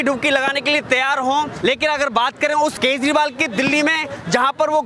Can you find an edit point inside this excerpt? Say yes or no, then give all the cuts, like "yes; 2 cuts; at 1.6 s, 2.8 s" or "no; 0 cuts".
yes; 2 cuts; at 1.5 s, 2.7 s